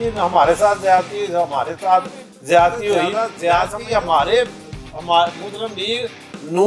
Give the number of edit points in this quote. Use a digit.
1